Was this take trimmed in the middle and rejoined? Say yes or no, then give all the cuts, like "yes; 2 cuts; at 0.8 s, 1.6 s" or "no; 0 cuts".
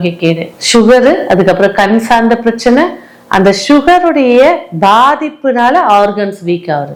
no; 0 cuts